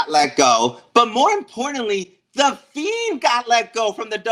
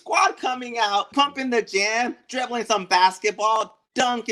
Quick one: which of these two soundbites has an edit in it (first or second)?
second